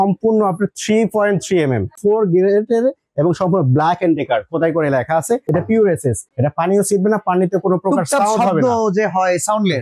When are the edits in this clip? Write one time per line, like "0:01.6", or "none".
0:02.0
0:05.4
0:06.3